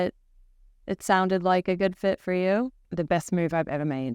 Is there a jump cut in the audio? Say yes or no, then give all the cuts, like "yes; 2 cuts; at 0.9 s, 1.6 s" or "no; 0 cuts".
yes; 1 cut; at 2.9 s